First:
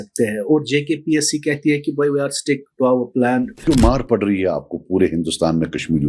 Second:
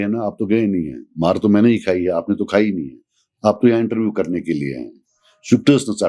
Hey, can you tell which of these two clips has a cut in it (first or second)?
first